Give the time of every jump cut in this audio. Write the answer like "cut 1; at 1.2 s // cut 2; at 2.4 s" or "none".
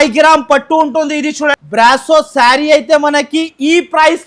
cut 1; at 1.6 s